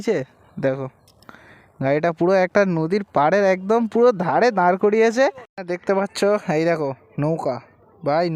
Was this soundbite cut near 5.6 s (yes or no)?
yes